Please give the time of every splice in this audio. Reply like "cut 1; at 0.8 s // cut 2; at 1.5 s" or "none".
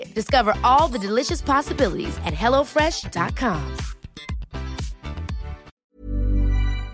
cut 1; at 5.7 s